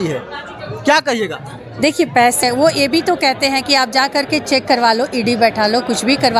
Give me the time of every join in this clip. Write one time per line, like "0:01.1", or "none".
0:02.4